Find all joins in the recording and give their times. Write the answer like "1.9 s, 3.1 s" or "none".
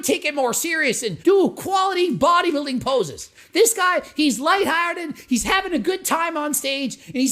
1.1 s